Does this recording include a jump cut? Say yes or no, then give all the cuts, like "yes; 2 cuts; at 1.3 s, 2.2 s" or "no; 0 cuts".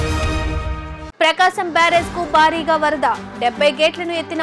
yes; 1 cut; at 0.9 s